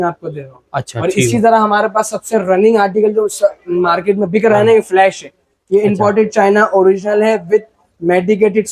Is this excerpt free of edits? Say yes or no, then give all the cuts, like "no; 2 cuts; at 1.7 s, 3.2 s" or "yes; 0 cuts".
yes; 0 cuts